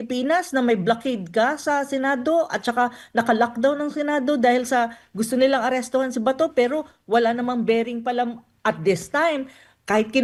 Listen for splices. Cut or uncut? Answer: uncut